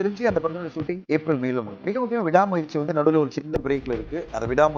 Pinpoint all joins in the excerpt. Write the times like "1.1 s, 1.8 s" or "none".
1.0 s, 1.7 s